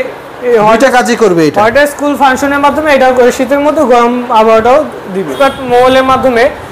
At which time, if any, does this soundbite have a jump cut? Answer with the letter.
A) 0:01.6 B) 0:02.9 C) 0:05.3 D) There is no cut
C